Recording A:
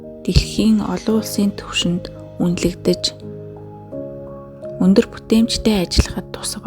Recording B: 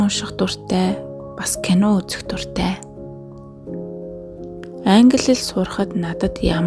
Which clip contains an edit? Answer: A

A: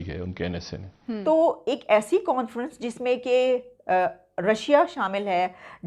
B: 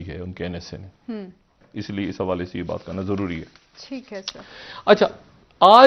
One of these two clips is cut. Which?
A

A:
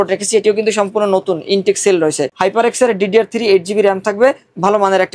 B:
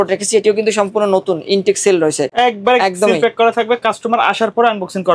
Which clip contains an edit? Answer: A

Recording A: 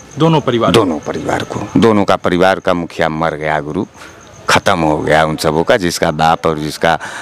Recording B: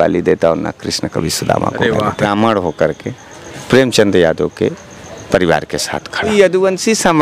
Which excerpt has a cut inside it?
B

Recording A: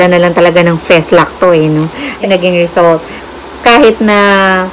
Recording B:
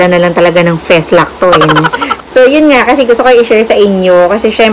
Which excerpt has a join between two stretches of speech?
B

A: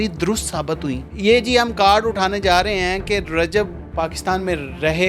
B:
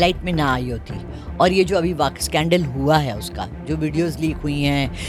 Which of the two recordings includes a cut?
A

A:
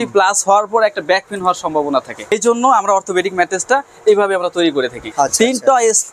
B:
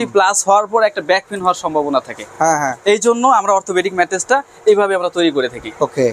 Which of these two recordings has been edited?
A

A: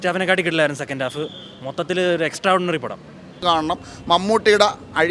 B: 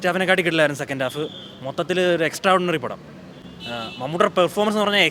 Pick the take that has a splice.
A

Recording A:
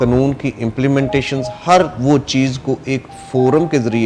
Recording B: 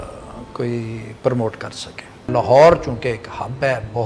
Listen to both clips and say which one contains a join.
B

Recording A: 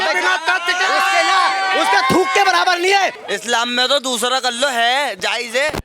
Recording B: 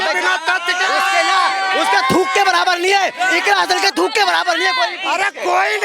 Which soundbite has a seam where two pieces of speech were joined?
A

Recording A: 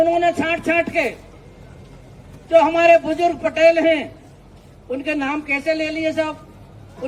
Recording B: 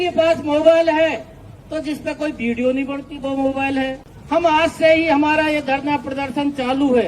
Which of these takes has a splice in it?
B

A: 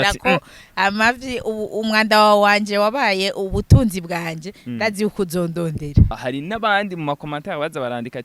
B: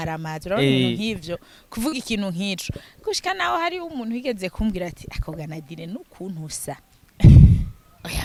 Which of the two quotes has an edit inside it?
A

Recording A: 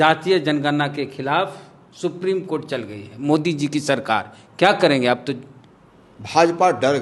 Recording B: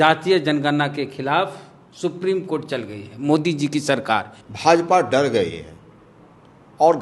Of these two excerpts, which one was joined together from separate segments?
B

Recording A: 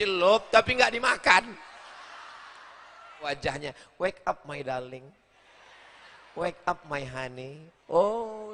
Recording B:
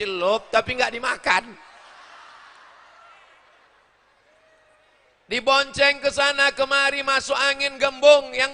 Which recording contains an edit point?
A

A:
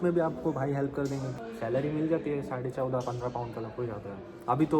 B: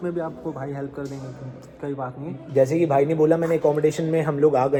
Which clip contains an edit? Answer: A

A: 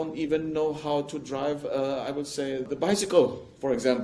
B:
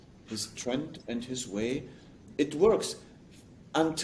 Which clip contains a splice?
A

